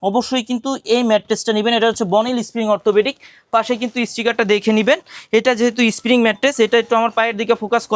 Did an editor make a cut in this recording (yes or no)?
no